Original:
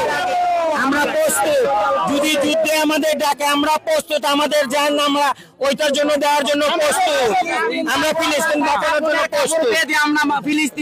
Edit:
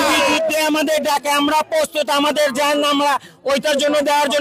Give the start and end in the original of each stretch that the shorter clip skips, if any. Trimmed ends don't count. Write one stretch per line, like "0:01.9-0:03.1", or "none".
none